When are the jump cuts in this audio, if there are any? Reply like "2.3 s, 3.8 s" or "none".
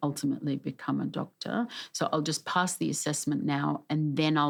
none